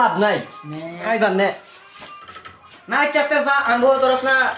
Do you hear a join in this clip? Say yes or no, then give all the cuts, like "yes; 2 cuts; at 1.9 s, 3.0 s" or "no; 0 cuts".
yes; 1 cut; at 1.0 s